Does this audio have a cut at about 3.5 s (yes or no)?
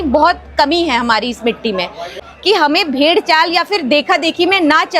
no